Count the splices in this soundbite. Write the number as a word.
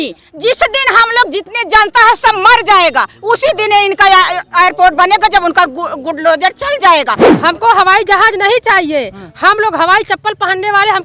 one